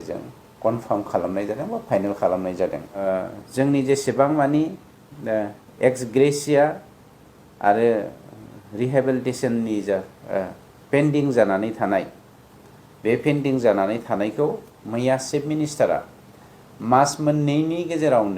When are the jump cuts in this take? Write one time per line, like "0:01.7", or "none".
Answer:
0:03.0